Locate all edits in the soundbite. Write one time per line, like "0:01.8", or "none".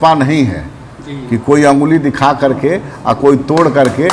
none

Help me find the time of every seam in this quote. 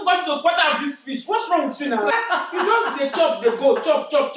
0:02.1

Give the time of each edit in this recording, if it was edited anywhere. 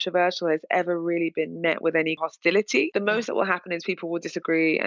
0:02.7

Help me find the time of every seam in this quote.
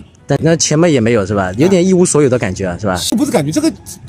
0:03.1

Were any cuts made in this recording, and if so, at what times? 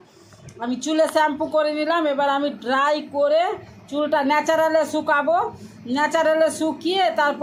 none

